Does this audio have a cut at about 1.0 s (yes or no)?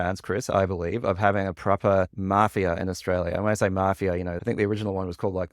no